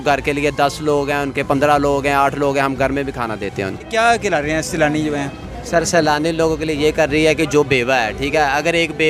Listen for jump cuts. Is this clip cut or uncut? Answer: uncut